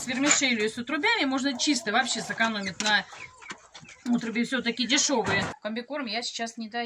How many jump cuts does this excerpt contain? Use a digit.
1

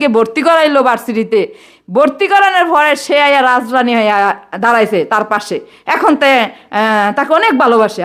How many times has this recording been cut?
0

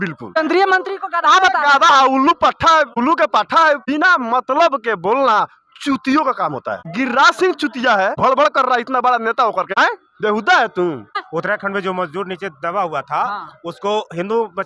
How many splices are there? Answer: 2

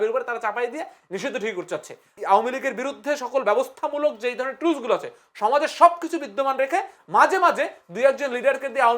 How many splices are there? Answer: 1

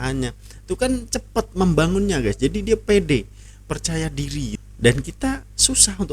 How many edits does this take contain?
1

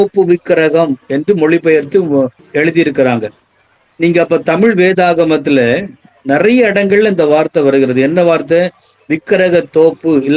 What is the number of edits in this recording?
1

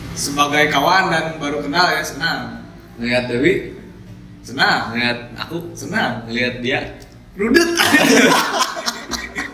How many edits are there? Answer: 0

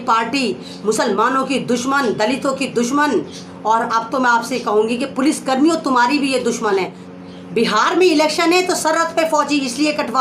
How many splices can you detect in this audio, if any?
1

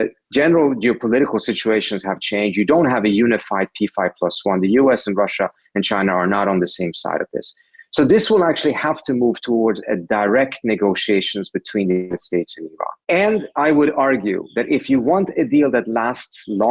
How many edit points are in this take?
1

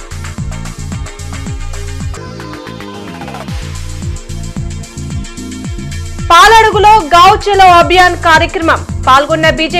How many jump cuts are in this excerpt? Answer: 1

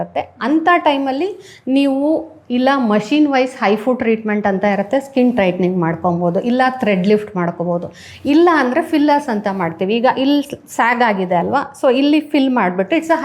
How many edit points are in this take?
0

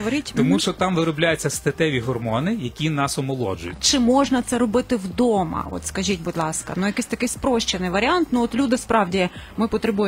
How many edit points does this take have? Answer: 1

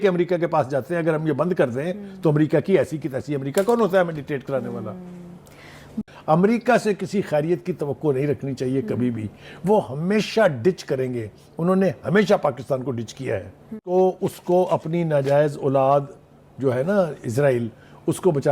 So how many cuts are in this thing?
2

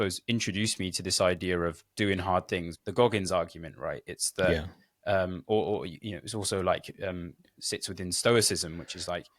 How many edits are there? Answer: 1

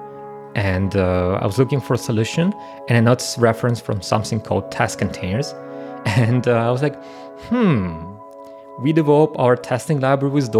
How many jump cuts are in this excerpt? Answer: 0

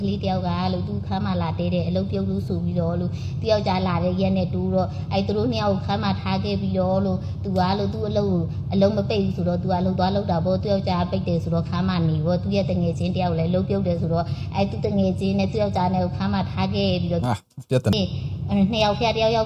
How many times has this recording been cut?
1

